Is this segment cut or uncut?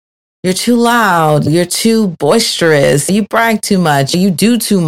cut